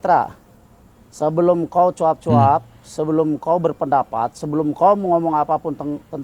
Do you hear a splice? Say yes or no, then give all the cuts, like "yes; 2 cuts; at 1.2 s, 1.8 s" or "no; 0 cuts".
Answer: no; 0 cuts